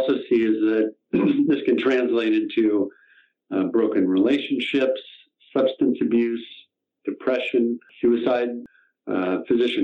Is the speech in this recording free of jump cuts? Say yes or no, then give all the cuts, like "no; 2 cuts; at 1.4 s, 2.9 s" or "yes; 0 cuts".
no; 2 cuts; at 7.9 s, 8.6 s